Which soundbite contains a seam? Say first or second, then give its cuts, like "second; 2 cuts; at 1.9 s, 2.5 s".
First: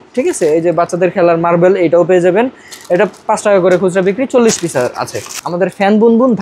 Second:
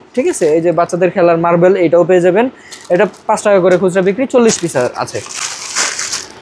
first; 1 cut; at 5.4 s